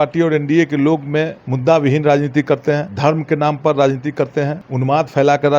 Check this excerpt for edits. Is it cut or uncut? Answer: cut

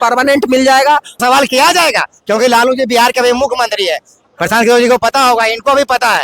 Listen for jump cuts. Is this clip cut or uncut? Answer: cut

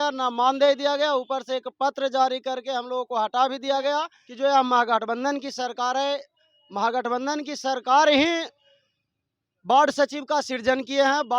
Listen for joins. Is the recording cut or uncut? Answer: cut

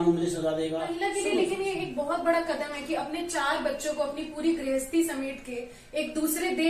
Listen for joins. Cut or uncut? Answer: cut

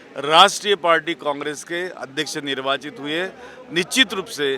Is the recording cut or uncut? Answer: uncut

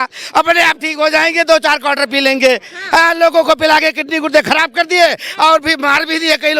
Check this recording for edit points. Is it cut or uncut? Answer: uncut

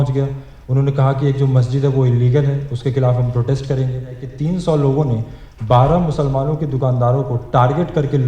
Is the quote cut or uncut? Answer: cut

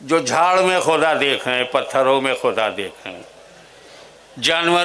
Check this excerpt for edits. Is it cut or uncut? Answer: uncut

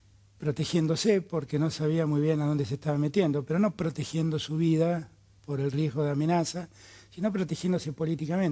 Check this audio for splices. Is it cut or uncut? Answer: uncut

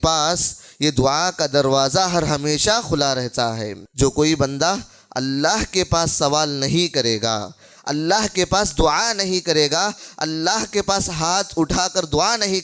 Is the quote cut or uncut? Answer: cut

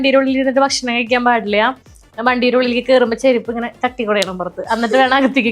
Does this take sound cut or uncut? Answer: uncut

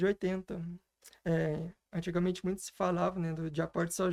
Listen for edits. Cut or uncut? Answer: uncut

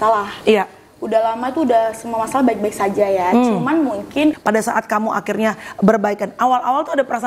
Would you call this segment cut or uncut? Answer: cut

